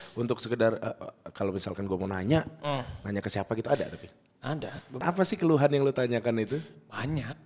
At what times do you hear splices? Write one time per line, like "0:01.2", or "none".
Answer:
0:05.0